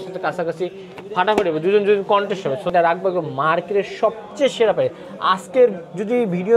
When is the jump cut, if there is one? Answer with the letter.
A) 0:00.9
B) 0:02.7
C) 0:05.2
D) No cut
B